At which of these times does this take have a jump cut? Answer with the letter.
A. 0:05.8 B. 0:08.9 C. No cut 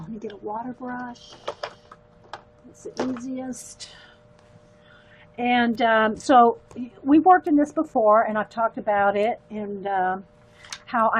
B